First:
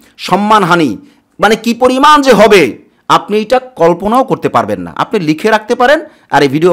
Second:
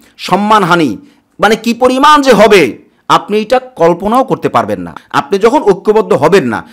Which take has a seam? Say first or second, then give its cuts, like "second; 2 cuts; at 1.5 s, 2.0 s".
second; 1 cut; at 4.9 s